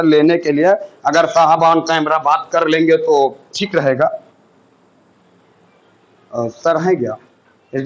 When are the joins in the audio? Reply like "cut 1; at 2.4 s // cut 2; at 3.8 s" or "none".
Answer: none